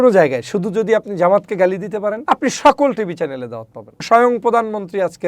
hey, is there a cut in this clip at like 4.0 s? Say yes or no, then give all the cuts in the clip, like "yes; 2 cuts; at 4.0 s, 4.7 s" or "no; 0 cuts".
yes; 2 cuts; at 2.2 s, 4.0 s